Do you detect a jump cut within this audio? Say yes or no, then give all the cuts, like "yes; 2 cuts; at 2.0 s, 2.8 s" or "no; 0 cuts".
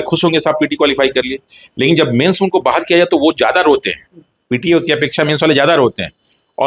no; 0 cuts